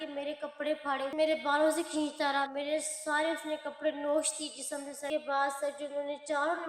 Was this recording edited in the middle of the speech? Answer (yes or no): no